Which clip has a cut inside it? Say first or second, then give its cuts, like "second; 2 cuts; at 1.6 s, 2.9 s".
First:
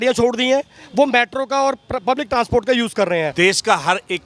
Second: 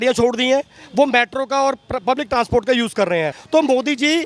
first; 1 cut; at 3.3 s